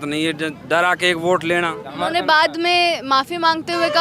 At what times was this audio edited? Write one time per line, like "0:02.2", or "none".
0:01.9